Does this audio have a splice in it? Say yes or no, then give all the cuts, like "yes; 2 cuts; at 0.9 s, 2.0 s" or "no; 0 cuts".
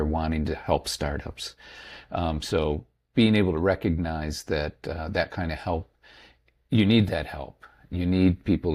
no; 0 cuts